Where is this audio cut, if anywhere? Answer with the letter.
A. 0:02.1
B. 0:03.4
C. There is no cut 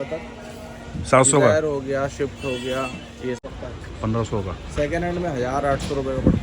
B